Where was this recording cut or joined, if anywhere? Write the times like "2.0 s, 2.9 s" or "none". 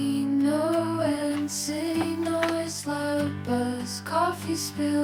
none